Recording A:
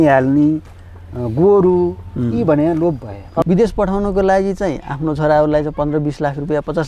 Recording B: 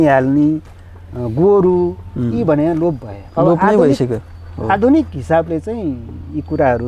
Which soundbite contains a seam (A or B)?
A